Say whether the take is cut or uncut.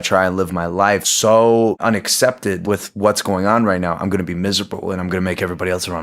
cut